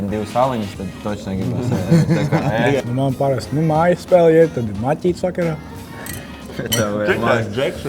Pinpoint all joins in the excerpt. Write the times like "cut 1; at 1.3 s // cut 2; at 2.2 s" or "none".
cut 1; at 2.8 s